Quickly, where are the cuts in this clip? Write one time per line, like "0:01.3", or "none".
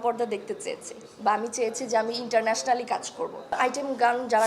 0:03.6